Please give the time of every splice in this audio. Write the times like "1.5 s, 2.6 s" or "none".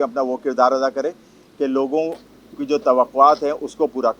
none